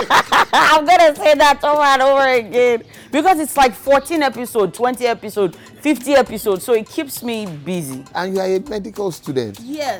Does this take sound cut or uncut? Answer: uncut